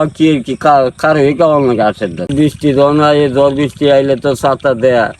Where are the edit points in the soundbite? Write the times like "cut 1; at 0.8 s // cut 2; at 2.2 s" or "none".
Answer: cut 1; at 2.3 s